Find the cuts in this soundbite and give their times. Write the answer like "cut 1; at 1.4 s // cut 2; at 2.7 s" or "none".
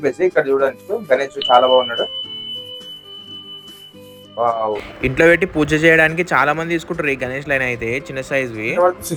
none